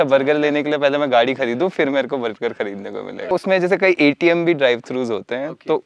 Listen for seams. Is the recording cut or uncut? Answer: uncut